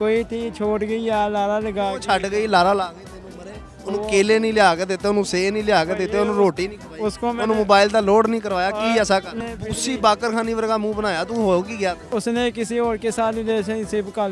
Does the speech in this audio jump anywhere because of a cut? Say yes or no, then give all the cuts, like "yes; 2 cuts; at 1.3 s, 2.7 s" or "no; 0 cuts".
yes; 2 cuts; at 9.3 s, 12.1 s